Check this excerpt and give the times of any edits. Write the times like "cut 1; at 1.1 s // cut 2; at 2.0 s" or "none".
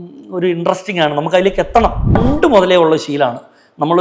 cut 1; at 2.2 s